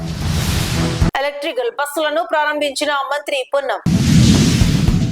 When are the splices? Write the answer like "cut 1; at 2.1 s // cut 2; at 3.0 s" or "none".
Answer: cut 1; at 1.1 s